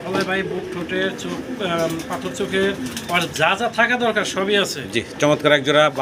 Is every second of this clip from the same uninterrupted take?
yes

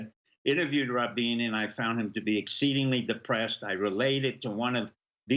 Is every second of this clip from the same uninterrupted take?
yes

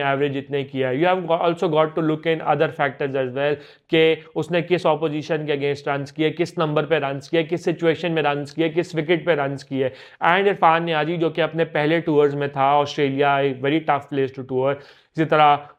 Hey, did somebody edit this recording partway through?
no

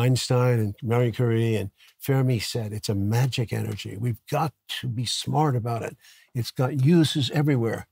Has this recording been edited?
no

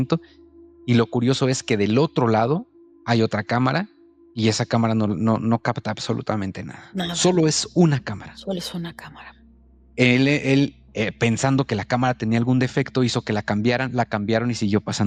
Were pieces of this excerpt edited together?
no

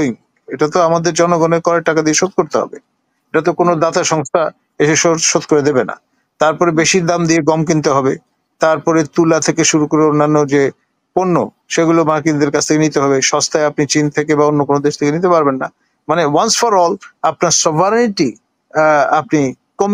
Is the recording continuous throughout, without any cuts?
yes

